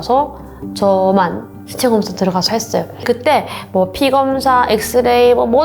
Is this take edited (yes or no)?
no